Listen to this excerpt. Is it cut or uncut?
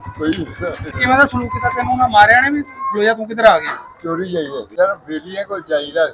cut